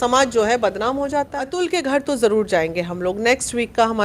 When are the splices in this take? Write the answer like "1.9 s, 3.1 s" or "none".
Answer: 1.4 s